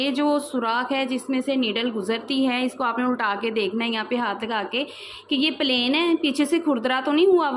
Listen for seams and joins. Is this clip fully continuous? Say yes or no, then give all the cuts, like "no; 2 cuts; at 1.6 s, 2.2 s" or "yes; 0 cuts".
yes; 0 cuts